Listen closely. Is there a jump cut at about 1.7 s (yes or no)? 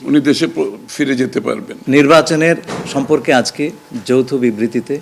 yes